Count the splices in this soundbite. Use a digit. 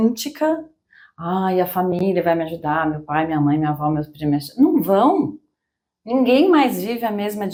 0